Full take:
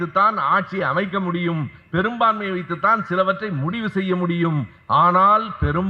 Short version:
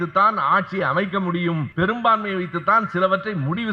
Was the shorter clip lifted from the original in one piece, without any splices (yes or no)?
no